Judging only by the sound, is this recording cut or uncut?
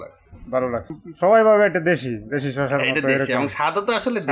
cut